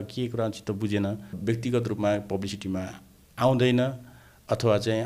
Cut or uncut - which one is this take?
cut